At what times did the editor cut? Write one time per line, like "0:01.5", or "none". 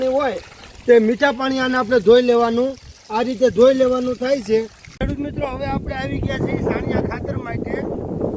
0:04.8